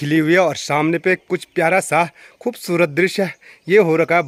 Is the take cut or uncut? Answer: uncut